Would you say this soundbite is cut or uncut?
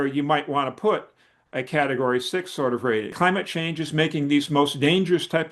cut